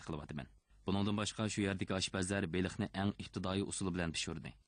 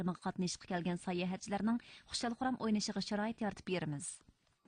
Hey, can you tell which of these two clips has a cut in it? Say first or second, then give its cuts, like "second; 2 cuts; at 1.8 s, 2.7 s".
first; 1 cut; at 1.2 s